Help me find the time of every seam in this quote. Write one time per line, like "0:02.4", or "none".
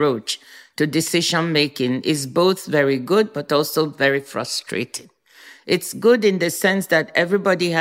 none

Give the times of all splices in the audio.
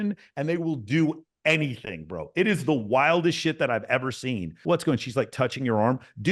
0:04.5

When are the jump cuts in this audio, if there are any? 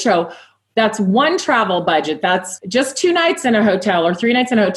0:02.5

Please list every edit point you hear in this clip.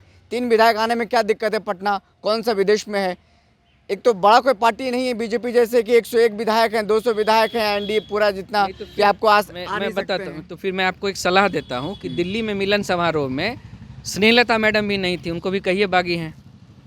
none

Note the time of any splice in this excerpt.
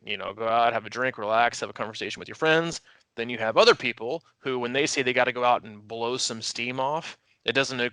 none

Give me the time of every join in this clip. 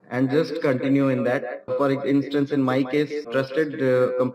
0:01.7
0:03.2

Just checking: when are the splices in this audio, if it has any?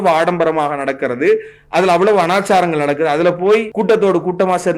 0:03.7

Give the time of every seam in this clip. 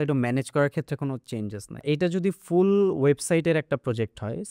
0:01.8

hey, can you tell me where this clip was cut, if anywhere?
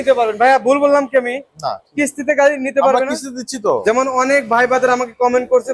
0:03.8

